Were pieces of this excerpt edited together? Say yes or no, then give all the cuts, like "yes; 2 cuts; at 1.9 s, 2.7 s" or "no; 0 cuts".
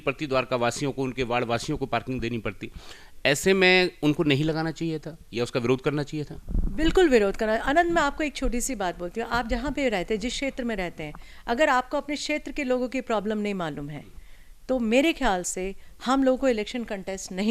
no; 0 cuts